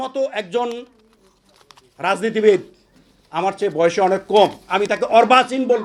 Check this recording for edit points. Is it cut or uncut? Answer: uncut